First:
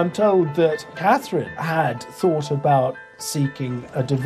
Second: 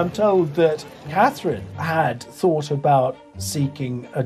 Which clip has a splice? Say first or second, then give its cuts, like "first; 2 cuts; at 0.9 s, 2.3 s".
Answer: first; 1 cut; at 1.1 s